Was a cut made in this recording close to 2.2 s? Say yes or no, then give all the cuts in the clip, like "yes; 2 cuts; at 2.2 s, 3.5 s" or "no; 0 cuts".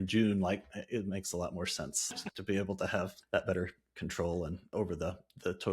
yes; 3 cuts; at 2.2 s, 3.2 s, 4.6 s